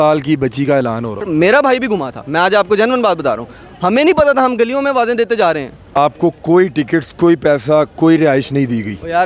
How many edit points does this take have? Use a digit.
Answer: 2